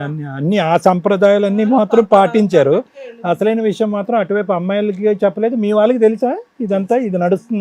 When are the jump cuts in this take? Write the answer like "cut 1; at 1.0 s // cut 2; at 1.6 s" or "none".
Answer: none